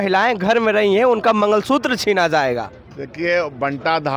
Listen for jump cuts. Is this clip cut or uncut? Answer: uncut